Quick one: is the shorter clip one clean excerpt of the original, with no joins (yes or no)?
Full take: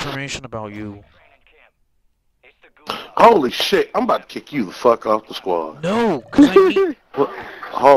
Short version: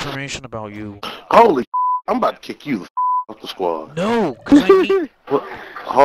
no